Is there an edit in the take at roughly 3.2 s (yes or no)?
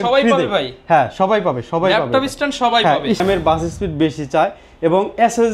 yes